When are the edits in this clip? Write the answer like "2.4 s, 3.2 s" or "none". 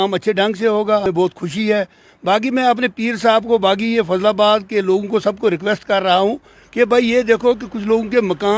1.1 s

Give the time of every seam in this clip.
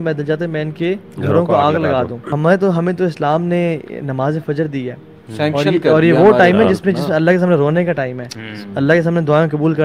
2.2 s

